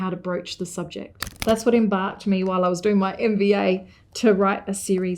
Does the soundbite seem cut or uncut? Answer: cut